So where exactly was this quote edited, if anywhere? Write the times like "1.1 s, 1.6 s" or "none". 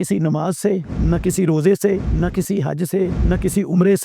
0.9 s, 2.1 s, 3.2 s